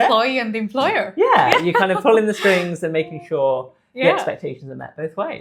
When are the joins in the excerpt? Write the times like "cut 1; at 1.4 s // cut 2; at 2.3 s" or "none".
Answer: none